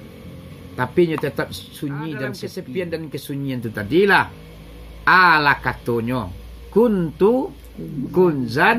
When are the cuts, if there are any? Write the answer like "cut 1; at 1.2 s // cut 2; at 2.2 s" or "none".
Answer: cut 1; at 2.5 s